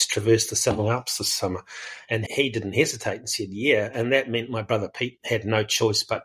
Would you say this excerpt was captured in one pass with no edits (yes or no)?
yes